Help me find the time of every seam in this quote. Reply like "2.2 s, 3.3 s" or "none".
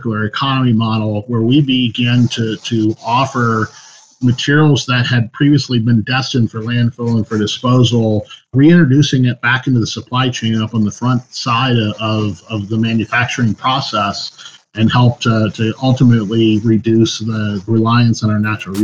17.7 s

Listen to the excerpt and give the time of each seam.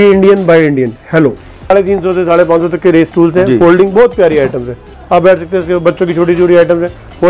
1.7 s

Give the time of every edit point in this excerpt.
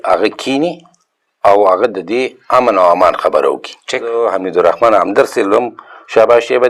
4.1 s

